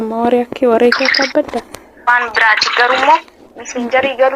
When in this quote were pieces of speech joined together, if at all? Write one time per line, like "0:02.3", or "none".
0:02.1